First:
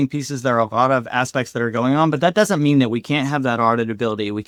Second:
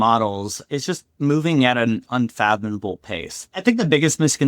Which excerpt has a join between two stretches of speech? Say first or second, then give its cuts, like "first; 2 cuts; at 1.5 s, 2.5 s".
second; 1 cut; at 3.4 s